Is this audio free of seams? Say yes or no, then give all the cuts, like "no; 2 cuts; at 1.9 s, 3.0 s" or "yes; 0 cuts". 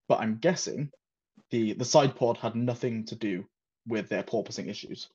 yes; 0 cuts